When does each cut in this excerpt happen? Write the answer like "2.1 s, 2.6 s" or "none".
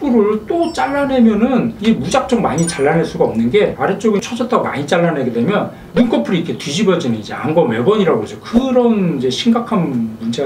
none